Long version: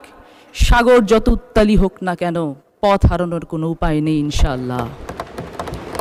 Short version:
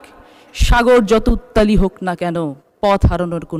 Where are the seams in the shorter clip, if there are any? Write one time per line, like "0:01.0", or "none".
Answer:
none